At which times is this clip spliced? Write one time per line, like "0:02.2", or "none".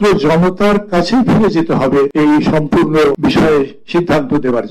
0:02.1
0:03.2